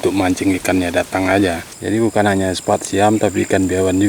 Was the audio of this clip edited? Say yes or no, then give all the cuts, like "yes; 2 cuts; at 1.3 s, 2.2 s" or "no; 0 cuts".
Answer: yes; 1 cut; at 1.7 s